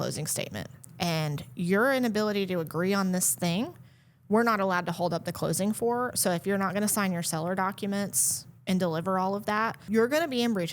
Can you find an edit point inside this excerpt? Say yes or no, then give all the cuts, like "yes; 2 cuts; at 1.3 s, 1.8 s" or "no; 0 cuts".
yes; 1 cut; at 9.8 s